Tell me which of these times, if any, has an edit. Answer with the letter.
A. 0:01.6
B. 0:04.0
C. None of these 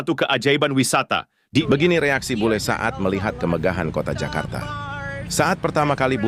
A